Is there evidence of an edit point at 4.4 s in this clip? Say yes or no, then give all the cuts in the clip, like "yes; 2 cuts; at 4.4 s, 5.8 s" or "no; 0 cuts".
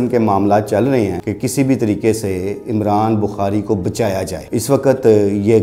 yes; 2 cuts; at 1.2 s, 4.4 s